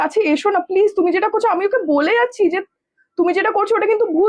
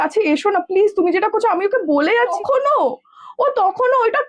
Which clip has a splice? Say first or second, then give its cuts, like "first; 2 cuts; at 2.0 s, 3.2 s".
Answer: second; 1 cut; at 2.3 s